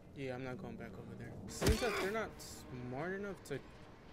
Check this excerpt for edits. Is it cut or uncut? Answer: cut